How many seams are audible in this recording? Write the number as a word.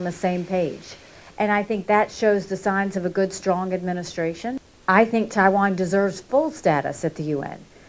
one